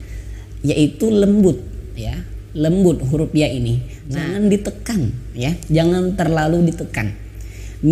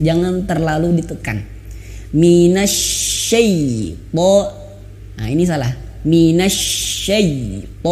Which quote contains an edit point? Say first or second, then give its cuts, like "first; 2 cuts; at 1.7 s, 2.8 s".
first; 1 cut; at 4.2 s